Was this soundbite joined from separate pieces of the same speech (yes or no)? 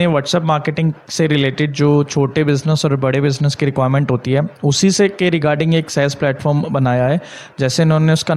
no